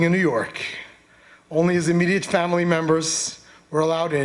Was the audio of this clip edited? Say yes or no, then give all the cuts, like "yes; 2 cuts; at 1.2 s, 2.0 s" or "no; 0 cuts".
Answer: no; 0 cuts